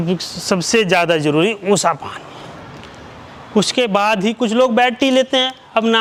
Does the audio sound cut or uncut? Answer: uncut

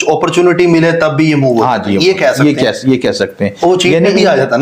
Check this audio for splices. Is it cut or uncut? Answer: uncut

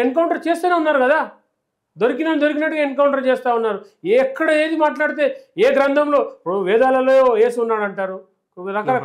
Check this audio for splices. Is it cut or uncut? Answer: uncut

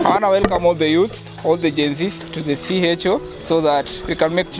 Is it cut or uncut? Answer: uncut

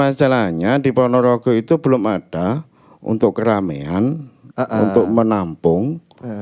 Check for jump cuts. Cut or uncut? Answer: uncut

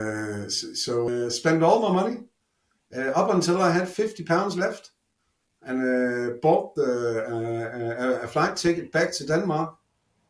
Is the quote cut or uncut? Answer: cut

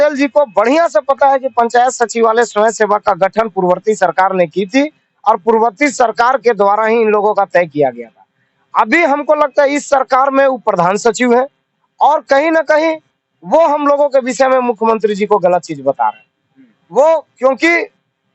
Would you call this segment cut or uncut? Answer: uncut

